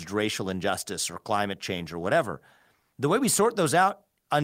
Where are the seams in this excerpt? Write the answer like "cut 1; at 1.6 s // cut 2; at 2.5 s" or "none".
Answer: none